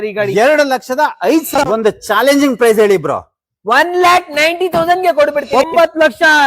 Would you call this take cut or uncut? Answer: cut